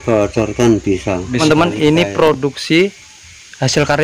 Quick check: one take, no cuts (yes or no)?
no